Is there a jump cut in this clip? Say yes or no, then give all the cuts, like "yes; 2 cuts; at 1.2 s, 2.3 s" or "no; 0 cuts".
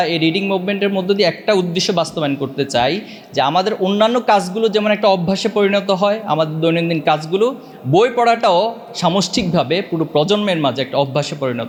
no; 0 cuts